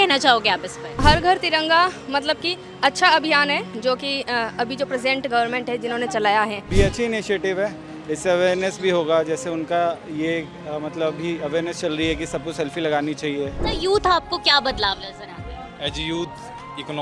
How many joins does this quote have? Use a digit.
3